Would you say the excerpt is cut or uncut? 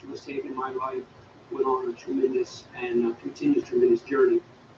cut